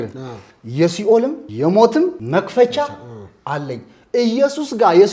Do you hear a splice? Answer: yes; 2 cuts; at 1.4 s, 2.2 s

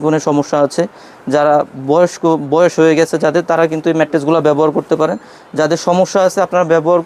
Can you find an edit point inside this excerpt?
no; 0 cuts

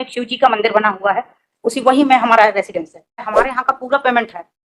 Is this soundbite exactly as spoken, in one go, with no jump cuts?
no; 1 cut; at 3.3 s

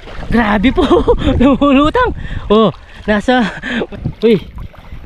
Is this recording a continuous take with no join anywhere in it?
no; 1 cut; at 3.9 s

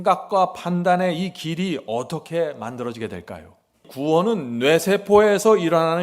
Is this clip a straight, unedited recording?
no; 1 cut; at 3.9 s

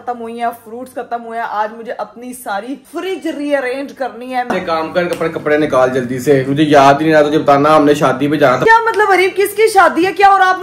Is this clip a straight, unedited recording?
no; 2 cuts; at 4.5 s, 8.6 s

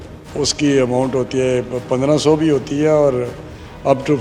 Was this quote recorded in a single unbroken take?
yes; 0 cuts

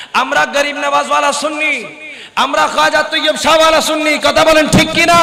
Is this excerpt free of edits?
yes; 0 cuts

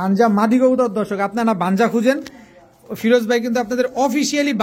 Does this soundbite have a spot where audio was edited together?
no; 0 cuts

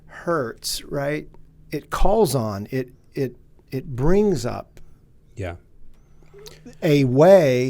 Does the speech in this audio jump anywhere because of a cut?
yes; 1 cut; at 1.4 s

